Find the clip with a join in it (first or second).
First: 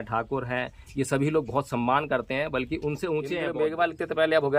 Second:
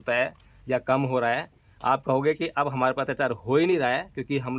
first